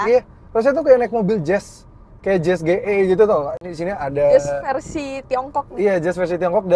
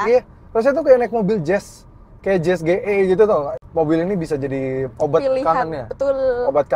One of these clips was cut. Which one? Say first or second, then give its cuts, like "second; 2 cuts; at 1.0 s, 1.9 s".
second; 1 cut; at 3.6 s